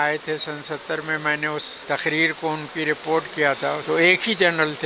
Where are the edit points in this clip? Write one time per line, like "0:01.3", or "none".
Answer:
0:01.7
0:03.8